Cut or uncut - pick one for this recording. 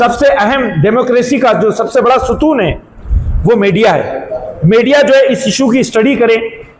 uncut